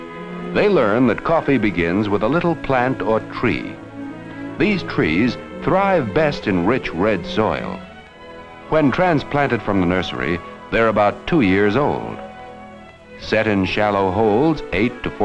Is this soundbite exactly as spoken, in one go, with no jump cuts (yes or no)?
no